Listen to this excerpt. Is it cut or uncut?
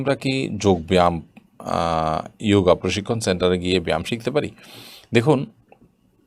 uncut